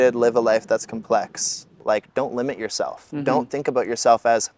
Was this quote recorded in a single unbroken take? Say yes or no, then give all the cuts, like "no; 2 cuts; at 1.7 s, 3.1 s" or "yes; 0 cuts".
no; 1 cut; at 1.7 s